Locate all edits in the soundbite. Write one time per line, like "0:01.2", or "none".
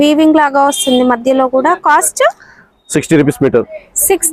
none